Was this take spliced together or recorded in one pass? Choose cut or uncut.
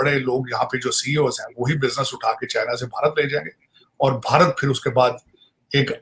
uncut